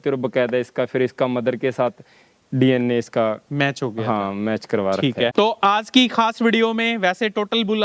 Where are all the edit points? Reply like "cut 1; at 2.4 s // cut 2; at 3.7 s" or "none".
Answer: cut 1; at 5.3 s